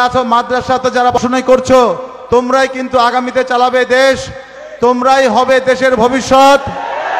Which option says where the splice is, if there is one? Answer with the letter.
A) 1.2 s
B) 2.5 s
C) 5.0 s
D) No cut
A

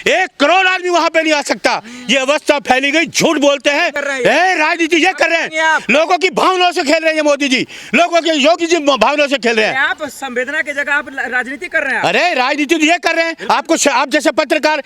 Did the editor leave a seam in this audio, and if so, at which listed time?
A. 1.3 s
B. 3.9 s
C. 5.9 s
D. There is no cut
B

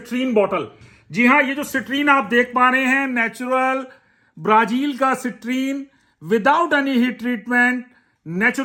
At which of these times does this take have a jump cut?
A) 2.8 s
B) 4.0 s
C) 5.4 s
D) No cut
D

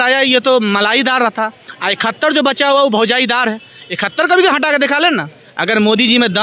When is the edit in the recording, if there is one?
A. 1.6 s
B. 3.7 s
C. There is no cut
C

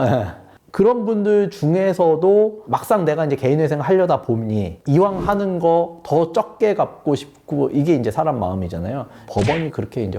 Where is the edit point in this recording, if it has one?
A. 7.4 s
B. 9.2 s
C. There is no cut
B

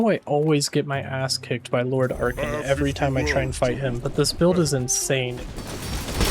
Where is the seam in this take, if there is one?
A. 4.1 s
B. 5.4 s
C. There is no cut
B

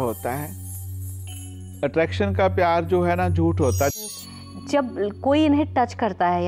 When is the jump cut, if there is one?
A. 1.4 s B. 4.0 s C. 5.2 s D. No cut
B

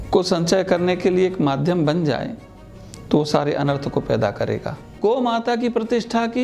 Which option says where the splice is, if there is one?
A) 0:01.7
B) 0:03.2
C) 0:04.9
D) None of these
C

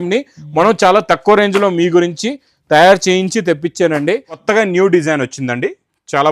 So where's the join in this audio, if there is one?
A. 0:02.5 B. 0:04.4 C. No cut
B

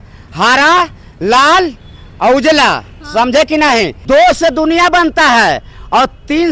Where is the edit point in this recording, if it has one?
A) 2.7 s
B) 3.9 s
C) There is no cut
B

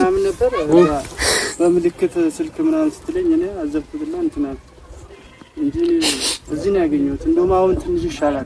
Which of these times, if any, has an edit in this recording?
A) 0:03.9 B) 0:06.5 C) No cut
C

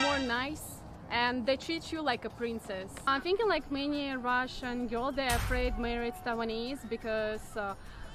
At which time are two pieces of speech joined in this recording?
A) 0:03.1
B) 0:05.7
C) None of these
A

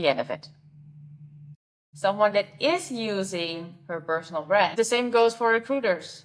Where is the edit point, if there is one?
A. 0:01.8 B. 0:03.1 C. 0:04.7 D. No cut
C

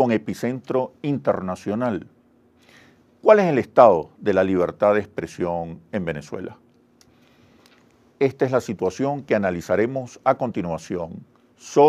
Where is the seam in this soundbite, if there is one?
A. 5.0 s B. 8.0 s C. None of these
A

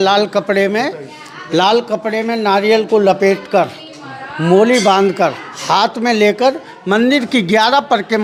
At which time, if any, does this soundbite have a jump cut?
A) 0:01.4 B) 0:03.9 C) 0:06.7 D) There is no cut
D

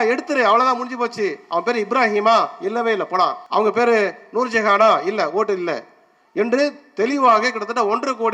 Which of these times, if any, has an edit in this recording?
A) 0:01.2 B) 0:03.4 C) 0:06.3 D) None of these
B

